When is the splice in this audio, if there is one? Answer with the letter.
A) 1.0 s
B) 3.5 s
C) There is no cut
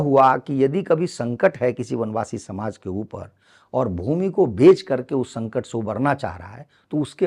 C